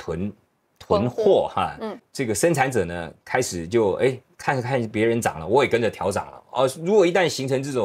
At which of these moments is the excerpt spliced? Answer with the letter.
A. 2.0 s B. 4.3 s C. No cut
A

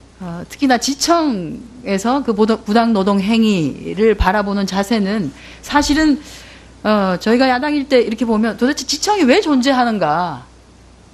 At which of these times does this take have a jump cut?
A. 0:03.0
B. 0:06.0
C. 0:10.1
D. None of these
D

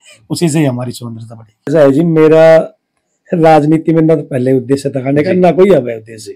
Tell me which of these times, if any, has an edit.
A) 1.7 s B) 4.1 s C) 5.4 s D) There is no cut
A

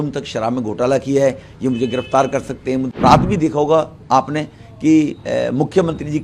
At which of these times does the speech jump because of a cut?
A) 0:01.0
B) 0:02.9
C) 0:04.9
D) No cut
B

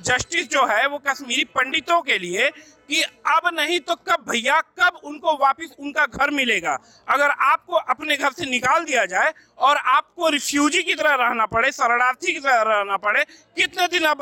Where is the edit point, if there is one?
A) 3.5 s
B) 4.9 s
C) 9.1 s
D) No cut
D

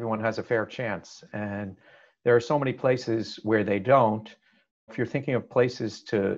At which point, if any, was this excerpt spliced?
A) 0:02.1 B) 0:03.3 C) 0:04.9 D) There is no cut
C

